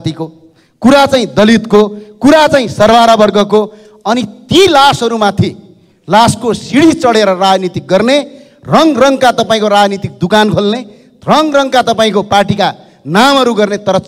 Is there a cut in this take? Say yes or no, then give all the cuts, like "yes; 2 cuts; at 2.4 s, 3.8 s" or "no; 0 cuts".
no; 0 cuts